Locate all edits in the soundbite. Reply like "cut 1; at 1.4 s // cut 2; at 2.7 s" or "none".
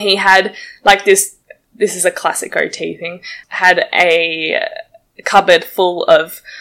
none